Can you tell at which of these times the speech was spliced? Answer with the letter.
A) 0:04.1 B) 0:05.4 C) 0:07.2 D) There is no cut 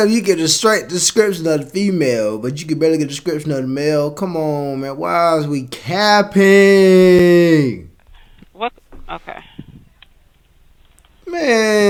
D